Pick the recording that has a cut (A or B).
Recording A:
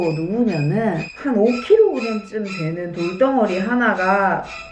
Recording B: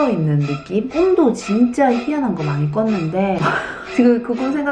A